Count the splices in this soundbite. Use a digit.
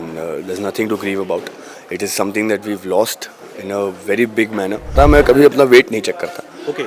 1